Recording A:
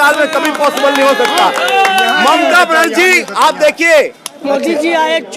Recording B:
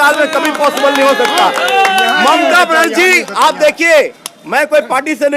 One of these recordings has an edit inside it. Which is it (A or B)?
A